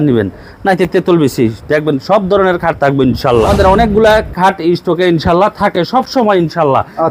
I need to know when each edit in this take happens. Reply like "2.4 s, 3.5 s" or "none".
3.5 s